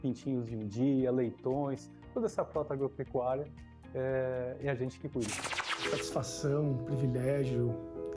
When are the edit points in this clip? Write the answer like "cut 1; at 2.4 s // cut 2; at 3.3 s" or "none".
cut 1; at 5.7 s